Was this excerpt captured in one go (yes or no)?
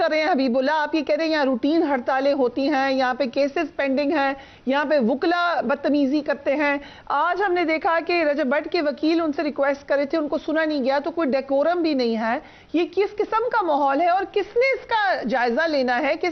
yes